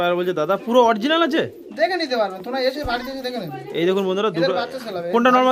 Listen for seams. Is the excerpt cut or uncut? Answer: uncut